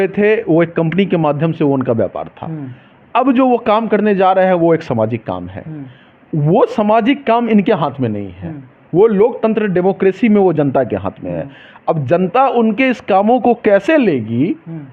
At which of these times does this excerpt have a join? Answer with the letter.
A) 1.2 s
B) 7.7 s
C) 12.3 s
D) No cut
D